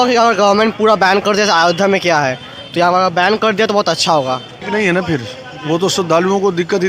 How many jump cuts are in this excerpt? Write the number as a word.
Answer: one